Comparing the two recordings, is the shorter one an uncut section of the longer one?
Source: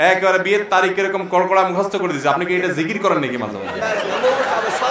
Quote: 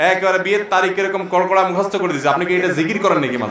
yes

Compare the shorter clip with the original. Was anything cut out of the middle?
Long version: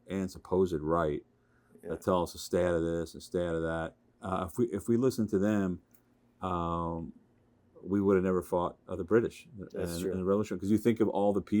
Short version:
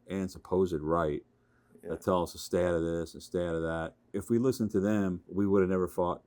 yes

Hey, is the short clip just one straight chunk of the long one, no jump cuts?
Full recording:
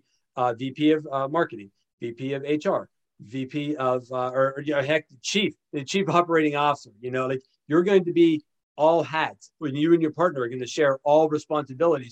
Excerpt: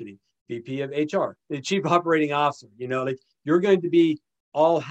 no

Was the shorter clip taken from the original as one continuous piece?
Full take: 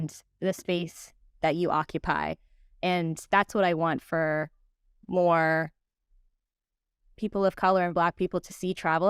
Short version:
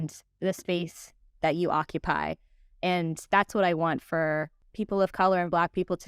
no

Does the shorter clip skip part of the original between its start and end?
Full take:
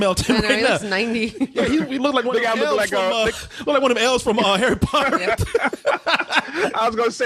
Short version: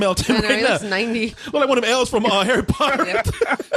yes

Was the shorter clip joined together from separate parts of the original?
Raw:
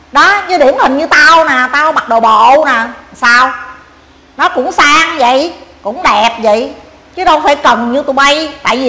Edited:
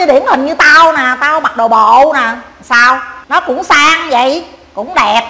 yes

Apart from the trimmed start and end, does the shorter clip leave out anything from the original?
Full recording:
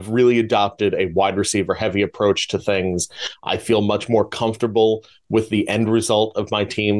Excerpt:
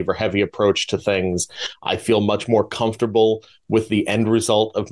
no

